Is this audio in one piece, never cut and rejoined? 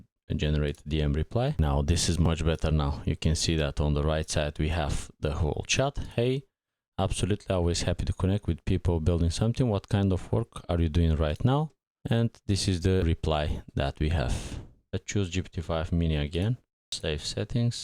no; 1 cut; at 14.9 s

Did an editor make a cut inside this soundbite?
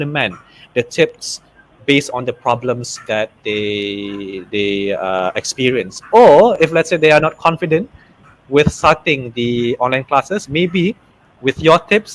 no; 0 cuts

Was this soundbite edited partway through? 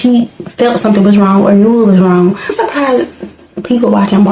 yes; 1 cut; at 2.5 s

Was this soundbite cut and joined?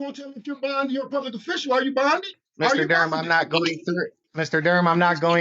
yes; 2 cuts; at 2.4 s, 4.2 s

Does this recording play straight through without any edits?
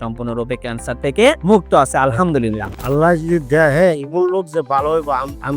no; 1 cut; at 2.7 s

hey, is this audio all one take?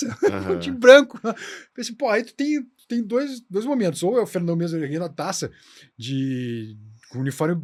yes; 0 cuts

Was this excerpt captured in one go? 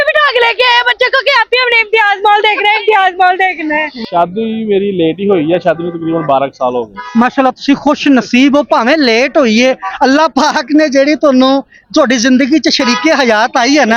no; 1 cut; at 3.9 s

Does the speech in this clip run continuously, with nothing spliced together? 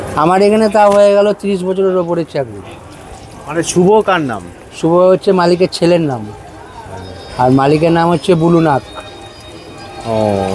yes; 0 cuts

